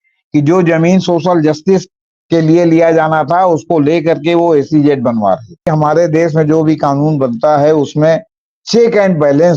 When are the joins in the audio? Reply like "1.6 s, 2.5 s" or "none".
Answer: 5.7 s